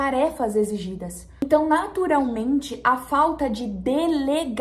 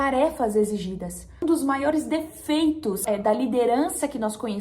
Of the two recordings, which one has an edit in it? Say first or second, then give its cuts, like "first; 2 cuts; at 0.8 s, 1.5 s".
second; 1 cut; at 1.4 s